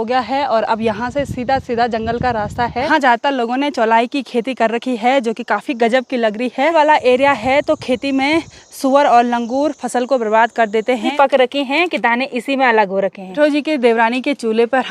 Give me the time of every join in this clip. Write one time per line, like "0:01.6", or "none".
0:02.9
0:06.7
0:11.1
0:13.4